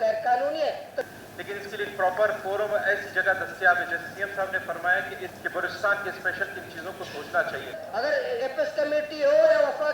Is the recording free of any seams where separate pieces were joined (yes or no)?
no